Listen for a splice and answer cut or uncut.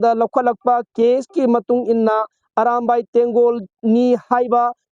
uncut